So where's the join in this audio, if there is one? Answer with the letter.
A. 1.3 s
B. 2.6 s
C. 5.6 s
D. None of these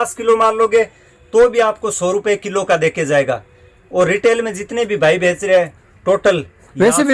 D